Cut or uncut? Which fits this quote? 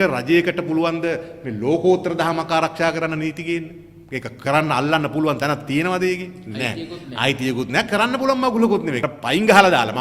cut